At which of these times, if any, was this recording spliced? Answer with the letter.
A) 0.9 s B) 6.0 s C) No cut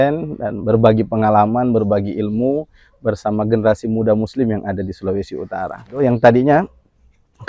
B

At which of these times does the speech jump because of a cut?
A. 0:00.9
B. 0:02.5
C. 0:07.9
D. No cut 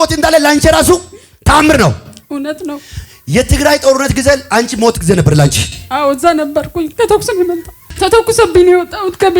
C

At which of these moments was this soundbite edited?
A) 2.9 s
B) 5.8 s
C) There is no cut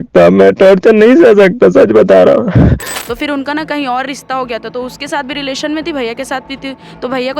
A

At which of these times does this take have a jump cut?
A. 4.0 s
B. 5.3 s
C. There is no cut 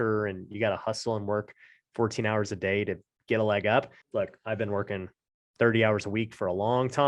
A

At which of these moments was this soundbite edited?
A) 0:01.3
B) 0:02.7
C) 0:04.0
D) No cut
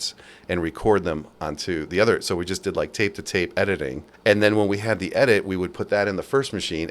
C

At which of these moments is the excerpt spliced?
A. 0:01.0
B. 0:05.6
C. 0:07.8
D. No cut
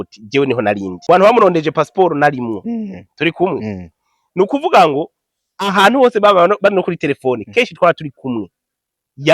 A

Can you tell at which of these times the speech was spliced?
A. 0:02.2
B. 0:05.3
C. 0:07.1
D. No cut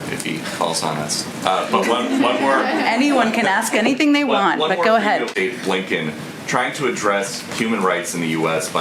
B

